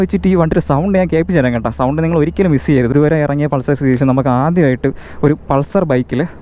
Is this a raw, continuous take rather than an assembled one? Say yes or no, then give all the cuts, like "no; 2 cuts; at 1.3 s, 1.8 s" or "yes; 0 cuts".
no; 1 cut; at 2.9 s